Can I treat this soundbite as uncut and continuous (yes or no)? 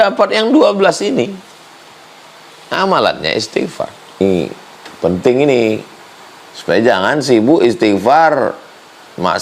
no